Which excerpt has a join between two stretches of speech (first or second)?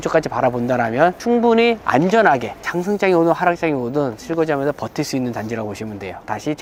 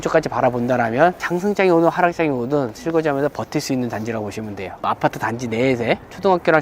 second